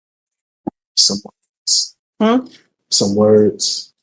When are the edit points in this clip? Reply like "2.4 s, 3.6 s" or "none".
none